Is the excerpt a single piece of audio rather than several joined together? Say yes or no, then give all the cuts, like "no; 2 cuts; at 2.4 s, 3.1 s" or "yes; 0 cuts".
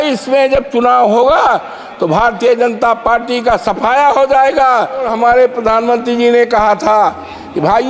no; 1 cut; at 5.1 s